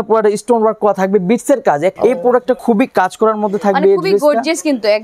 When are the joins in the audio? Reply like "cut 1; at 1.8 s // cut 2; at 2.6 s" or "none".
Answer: cut 1; at 2.0 s